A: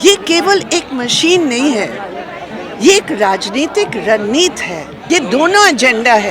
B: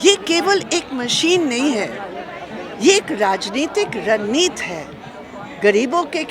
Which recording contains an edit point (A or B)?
A